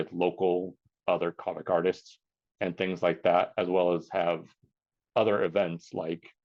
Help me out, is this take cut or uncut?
uncut